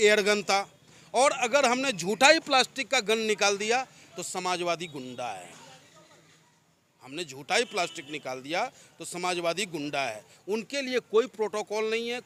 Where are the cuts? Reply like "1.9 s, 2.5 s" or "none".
none